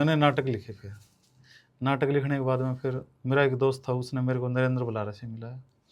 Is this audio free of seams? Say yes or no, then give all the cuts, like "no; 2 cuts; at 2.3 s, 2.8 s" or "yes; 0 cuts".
yes; 0 cuts